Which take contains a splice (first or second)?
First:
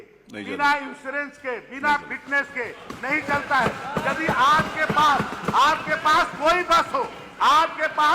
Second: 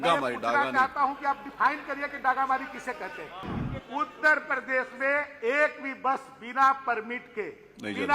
second